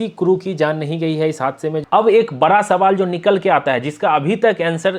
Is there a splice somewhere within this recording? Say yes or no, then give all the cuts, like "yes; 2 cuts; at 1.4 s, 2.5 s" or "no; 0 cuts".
yes; 1 cut; at 1.8 s